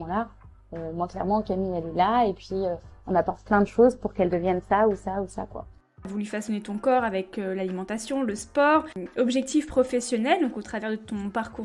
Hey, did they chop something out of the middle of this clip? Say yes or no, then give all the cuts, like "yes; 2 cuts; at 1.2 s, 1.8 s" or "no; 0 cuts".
yes; 2 cuts; at 6.1 s, 9.0 s